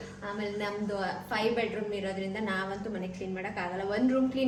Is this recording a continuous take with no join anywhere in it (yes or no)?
yes